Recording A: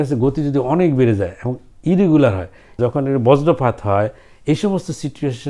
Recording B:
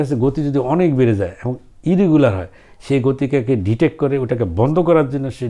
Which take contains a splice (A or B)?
A